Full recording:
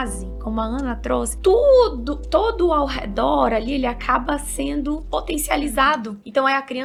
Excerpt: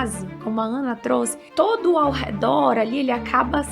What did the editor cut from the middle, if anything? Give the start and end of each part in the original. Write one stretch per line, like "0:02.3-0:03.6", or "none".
0:01.3-0:02.1